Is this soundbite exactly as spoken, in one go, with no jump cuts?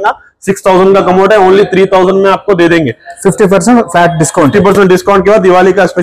yes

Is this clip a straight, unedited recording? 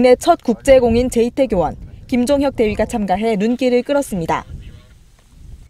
no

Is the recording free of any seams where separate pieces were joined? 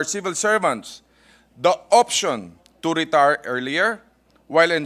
yes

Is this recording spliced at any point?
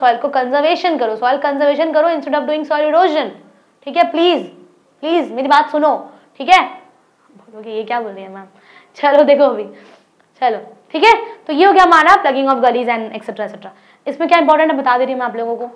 no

